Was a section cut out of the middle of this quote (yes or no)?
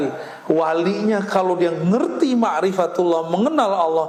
no